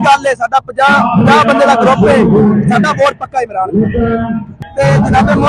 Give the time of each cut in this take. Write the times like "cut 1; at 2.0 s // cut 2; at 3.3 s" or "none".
cut 1; at 4.6 s

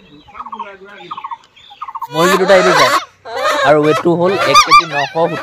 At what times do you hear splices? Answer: cut 1; at 2.1 s

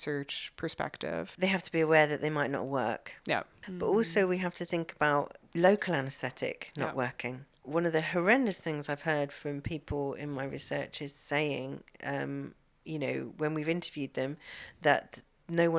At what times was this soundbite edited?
cut 1; at 1.3 s // cut 2; at 3.6 s // cut 3; at 5.4 s // cut 4; at 7.5 s

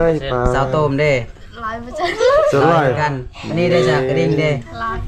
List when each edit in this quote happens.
none

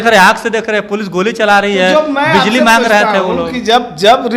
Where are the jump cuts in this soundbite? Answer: none

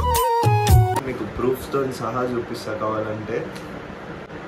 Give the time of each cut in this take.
none

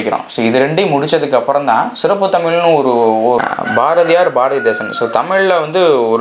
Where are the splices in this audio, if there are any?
cut 1; at 3.4 s

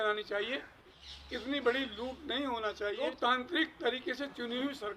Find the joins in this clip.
cut 1; at 1.0 s // cut 2; at 3.0 s

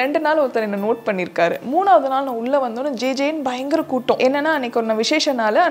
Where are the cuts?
cut 1; at 4.2 s

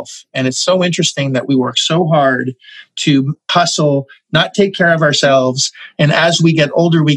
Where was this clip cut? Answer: cut 1; at 3.4 s

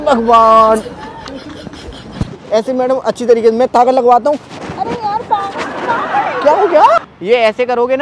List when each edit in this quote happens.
cut 1; at 7.0 s

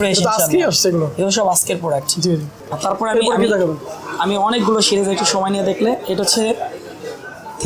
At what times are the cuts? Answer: none

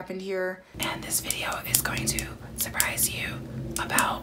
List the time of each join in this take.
cut 1; at 1.0 s

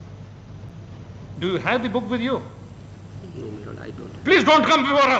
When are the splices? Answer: none

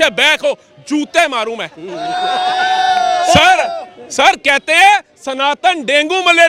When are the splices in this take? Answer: none

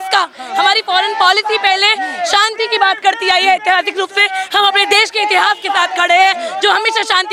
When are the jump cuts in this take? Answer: none

